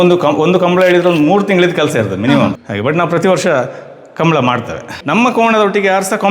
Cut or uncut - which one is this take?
cut